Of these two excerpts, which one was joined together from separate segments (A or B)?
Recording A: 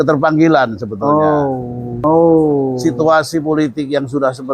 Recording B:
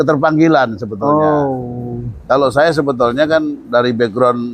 A